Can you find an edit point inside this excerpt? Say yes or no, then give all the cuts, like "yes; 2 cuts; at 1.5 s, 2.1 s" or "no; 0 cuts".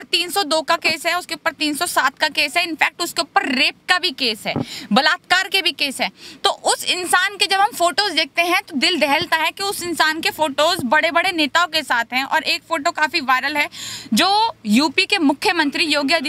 no; 0 cuts